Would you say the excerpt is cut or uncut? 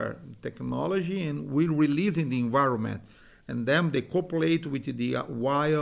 uncut